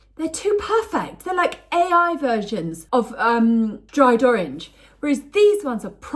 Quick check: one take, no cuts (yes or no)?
no